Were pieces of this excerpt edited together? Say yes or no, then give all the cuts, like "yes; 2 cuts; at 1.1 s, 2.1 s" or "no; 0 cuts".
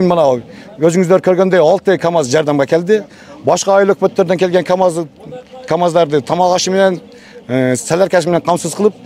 no; 0 cuts